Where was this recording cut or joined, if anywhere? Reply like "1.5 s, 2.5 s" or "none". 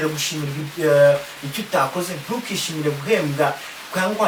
none